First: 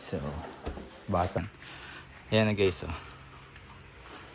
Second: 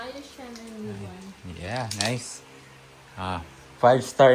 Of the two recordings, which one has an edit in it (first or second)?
first